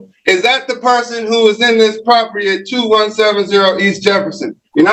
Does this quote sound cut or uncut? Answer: uncut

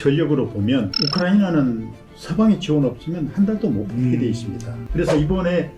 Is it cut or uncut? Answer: cut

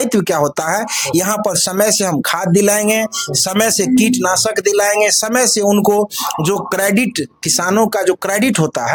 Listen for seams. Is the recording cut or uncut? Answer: uncut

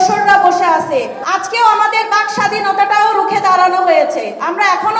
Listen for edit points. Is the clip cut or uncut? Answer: cut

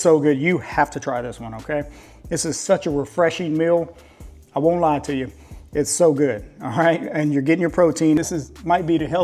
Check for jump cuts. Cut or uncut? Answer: cut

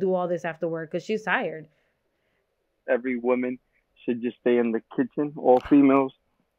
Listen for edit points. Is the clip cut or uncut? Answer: cut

